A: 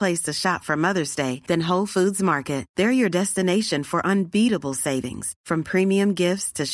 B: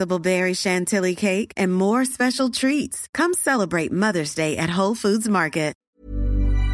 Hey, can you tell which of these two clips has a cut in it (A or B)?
B